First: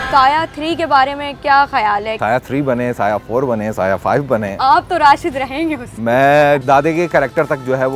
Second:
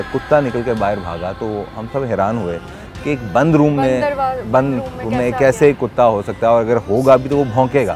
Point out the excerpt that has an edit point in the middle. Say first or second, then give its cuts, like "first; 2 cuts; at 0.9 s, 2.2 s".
first; 2 cuts; at 2.1 s, 6.6 s